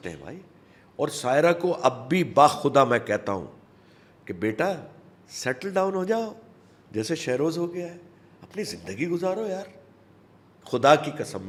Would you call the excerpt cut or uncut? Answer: uncut